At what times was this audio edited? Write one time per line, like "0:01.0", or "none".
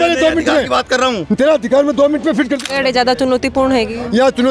0:02.6